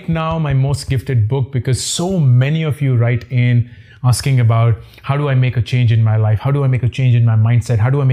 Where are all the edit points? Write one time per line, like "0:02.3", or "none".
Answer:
none